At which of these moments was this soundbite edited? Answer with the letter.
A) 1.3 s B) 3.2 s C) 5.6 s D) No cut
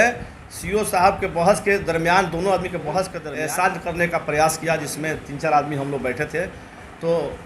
B